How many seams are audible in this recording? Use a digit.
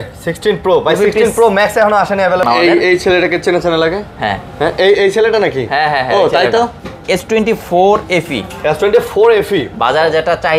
2